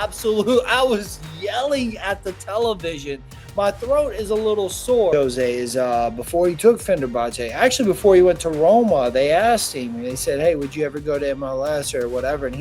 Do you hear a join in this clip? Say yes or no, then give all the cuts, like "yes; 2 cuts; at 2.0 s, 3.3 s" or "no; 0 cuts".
yes; 1 cut; at 5.1 s